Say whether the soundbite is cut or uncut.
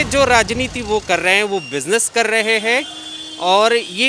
uncut